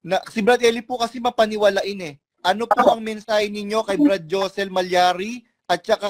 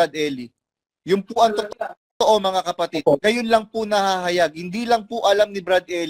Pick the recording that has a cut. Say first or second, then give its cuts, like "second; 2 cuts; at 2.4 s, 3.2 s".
first; 1 cut; at 2.3 s